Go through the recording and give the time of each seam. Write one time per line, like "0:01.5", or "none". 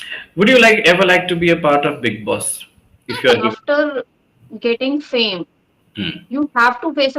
0:03.5